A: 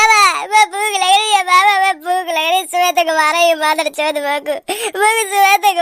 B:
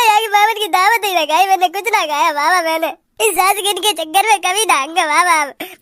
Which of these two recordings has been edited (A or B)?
B